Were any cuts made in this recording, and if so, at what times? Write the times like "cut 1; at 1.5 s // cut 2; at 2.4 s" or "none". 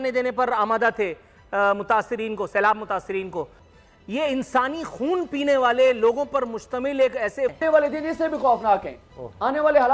cut 1; at 3.6 s // cut 2; at 7.5 s